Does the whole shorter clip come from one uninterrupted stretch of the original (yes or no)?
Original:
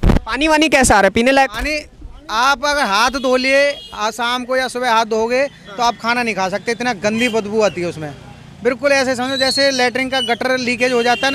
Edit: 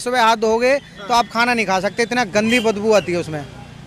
yes